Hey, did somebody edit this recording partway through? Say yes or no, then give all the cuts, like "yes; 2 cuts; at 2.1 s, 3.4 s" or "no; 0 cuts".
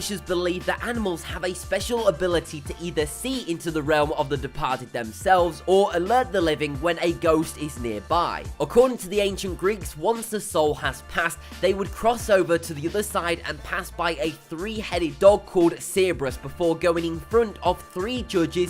yes; 1 cut; at 14.7 s